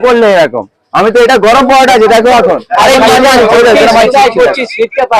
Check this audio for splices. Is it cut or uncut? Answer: uncut